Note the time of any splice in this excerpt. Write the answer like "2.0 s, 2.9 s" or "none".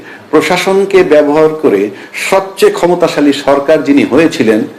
none